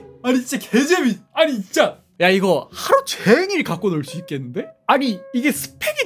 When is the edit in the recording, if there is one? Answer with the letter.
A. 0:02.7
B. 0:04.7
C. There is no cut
B